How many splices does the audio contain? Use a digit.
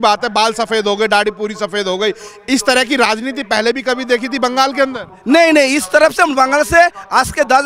0